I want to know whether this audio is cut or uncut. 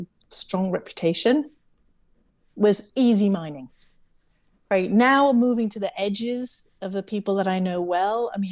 uncut